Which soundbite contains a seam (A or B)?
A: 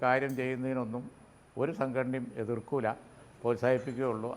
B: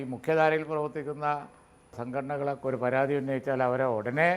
B